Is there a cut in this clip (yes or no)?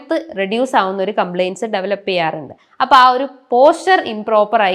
no